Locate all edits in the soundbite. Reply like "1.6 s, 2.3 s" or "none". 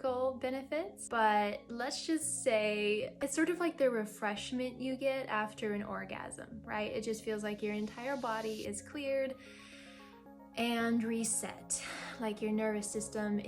1.0 s, 3.2 s